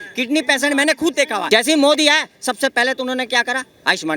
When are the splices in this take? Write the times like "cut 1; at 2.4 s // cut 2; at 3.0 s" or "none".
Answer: cut 1; at 1.4 s